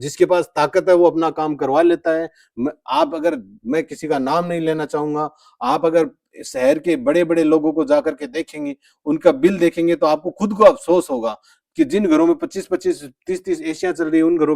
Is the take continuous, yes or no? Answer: yes